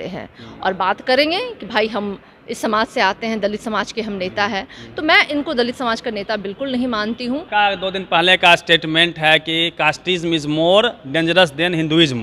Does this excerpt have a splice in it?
yes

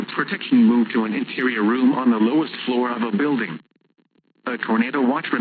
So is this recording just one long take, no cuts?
yes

